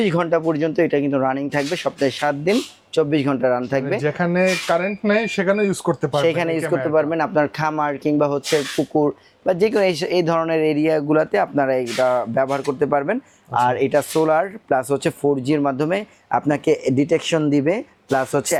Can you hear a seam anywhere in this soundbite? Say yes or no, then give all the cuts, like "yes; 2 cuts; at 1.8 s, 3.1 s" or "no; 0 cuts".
no; 0 cuts